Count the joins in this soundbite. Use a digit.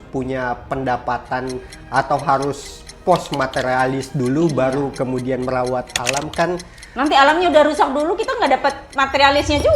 1